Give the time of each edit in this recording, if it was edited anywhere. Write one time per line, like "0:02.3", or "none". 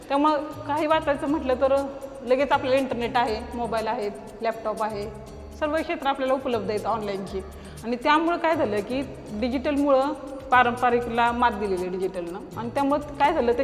none